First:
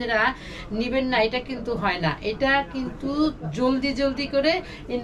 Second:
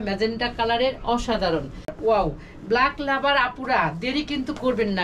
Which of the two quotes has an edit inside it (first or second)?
second